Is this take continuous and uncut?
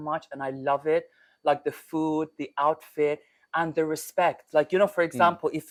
yes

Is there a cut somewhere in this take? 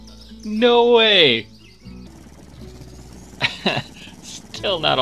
yes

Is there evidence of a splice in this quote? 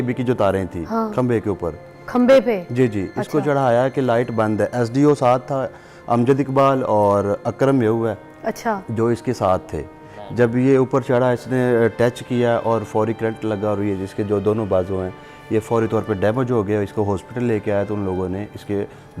no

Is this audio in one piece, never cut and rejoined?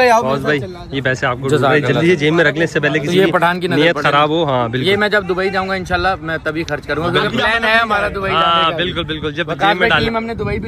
yes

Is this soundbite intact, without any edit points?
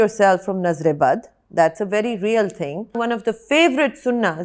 no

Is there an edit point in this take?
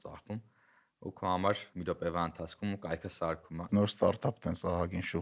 yes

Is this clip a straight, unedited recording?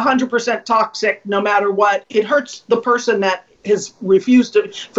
no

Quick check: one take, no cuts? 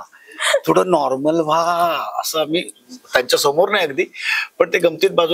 yes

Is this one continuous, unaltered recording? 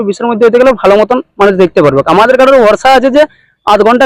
yes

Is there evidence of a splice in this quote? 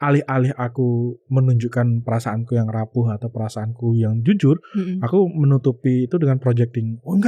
no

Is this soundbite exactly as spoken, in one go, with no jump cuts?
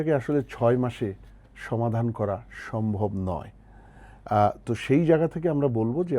yes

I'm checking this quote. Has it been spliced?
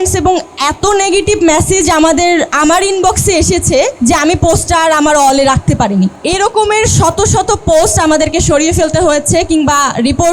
yes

